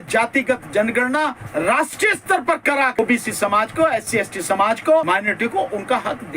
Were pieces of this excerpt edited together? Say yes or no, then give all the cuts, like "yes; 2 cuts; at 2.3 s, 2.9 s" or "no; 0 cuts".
yes; 2 cuts; at 3.0 s, 5.0 s